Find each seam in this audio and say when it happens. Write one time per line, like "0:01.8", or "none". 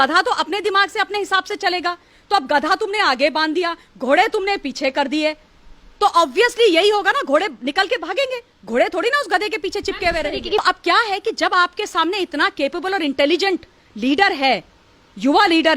0:10.6